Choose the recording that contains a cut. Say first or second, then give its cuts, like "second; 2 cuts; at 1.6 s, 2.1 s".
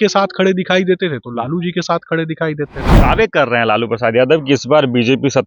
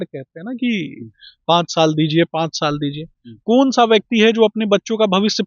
first; 1 cut; at 2.8 s